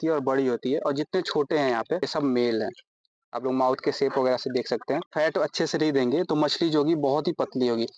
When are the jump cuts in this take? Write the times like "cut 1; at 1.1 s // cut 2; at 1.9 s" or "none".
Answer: cut 1; at 2.1 s // cut 2; at 5.1 s